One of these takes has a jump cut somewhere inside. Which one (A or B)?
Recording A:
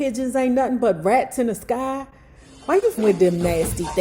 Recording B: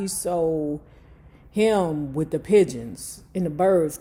A